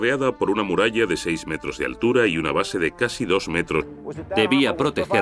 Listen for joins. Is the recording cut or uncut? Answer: uncut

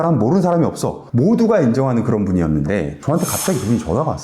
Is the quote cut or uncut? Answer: cut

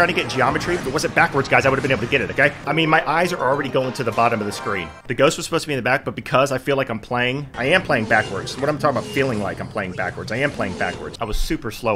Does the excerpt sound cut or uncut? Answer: cut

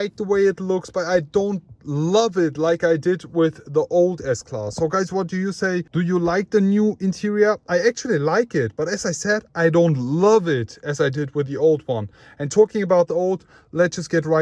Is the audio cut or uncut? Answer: uncut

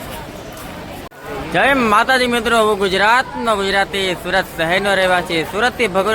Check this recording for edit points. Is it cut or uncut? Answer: cut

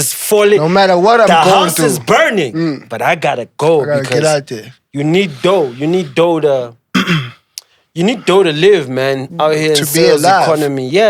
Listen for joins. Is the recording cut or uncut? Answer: uncut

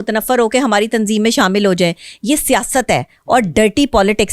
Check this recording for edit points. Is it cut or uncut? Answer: uncut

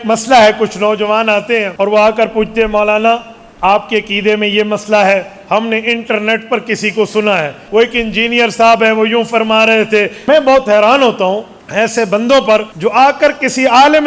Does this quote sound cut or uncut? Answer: cut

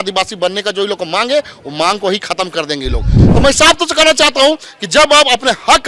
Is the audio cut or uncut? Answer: cut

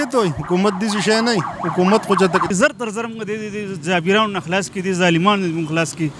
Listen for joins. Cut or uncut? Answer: cut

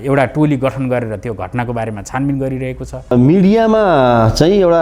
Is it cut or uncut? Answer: cut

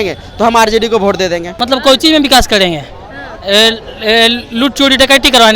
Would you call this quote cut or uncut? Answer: cut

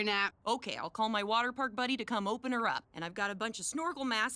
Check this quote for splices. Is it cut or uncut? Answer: uncut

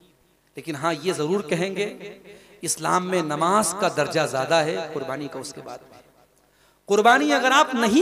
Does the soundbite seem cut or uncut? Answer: uncut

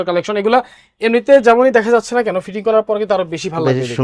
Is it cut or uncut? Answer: uncut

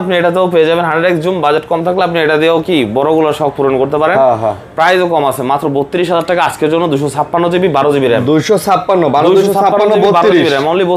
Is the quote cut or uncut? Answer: uncut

